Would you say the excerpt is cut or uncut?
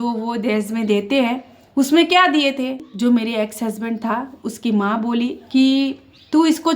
cut